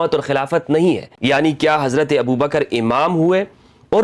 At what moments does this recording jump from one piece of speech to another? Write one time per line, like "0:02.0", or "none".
0:01.1